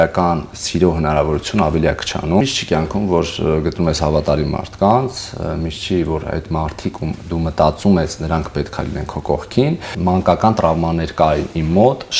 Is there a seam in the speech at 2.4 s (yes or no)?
yes